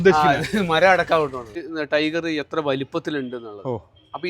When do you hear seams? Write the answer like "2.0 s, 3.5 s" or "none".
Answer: 1.7 s